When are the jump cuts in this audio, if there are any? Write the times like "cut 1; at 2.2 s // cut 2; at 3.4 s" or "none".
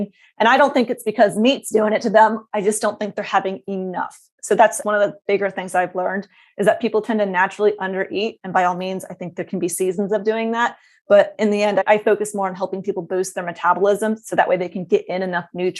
none